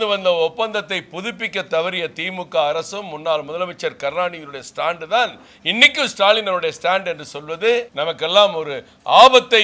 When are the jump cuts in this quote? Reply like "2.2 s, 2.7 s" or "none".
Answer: 7.9 s